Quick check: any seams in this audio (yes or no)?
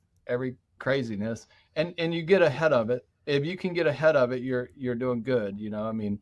no